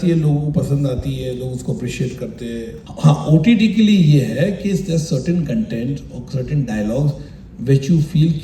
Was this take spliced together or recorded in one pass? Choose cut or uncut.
cut